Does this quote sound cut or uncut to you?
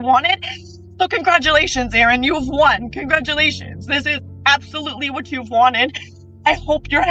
uncut